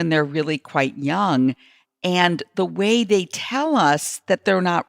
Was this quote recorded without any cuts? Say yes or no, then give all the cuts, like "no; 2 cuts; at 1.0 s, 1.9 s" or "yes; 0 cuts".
yes; 0 cuts